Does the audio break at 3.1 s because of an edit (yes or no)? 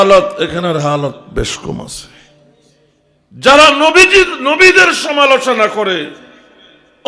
yes